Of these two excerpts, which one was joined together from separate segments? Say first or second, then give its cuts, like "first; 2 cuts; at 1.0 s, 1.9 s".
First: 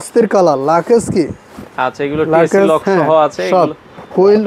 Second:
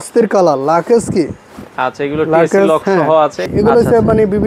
second; 1 cut; at 3.4 s